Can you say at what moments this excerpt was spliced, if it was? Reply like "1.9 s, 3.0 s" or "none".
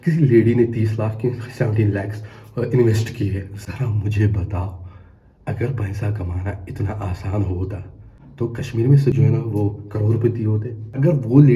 none